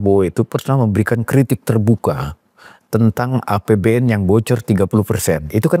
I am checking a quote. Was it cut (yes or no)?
no